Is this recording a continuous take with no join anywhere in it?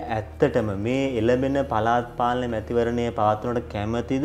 yes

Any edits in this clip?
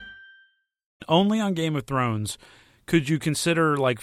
yes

